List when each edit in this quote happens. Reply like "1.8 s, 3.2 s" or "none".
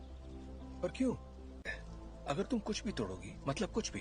none